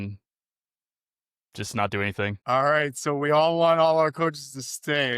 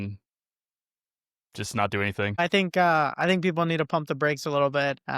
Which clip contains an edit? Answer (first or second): second